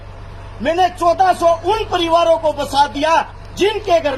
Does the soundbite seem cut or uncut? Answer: uncut